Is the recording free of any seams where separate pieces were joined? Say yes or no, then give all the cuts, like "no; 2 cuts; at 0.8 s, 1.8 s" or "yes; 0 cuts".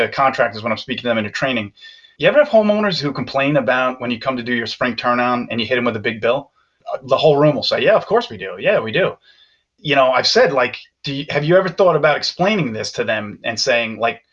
no; 1 cut; at 9.7 s